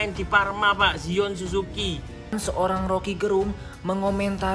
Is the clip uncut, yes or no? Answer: no